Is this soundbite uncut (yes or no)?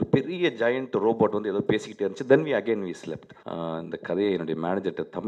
no